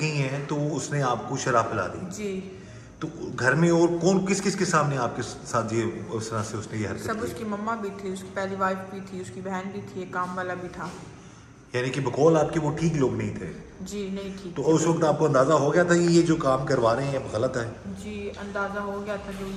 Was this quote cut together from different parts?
no; 0 cuts

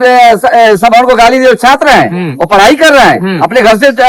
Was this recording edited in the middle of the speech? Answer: no; 0 cuts

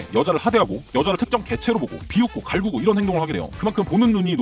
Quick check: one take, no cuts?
no; 1 cut; at 3.5 s

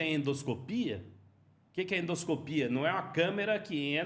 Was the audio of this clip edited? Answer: no; 0 cuts

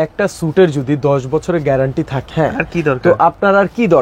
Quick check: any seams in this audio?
yes; 1 cut; at 2.2 s

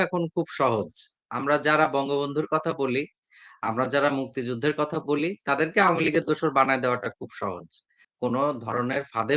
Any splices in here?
yes; 1 cut; at 8.0 s

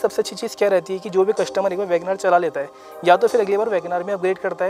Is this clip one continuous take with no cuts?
yes; 0 cuts

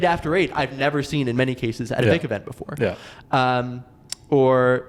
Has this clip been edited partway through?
no; 0 cuts

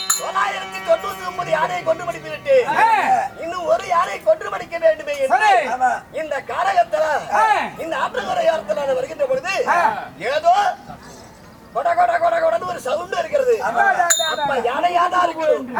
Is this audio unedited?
yes; 0 cuts

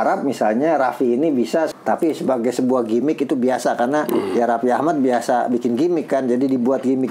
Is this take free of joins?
no; 1 cut; at 1.8 s

